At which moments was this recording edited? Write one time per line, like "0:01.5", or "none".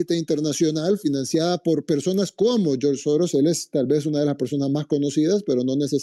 none